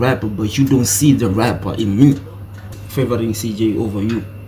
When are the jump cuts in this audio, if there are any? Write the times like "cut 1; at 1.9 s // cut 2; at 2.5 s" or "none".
cut 1; at 2.8 s